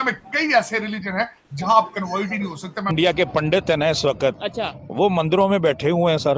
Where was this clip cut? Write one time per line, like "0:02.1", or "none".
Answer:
0:02.9